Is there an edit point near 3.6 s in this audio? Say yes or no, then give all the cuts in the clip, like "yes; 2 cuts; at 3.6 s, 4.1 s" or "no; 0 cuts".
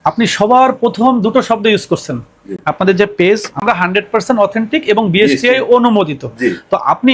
yes; 1 cut; at 3.6 s